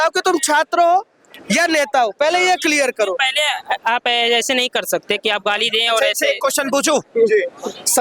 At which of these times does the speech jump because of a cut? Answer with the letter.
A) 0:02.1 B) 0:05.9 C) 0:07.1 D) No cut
D